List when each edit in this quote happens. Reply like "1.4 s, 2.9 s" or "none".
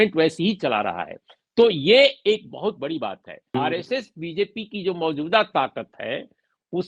3.4 s